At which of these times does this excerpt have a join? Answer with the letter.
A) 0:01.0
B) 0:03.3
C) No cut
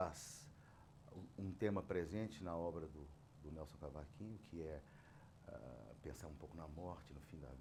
C